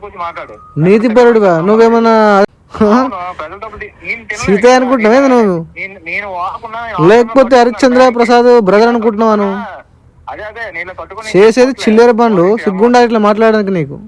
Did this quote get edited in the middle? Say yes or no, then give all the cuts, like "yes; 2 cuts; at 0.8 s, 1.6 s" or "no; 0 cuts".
yes; 1 cut; at 2.5 s